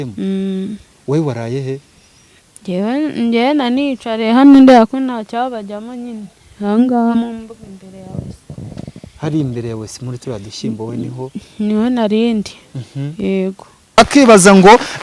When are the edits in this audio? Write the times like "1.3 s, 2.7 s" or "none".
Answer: 14.0 s